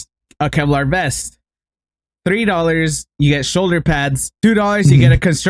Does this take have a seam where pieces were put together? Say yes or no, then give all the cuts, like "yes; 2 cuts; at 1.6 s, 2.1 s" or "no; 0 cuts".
yes; 1 cut; at 4.0 s